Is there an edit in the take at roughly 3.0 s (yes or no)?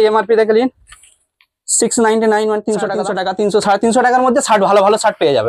yes